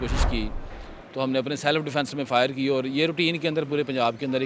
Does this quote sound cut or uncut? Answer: uncut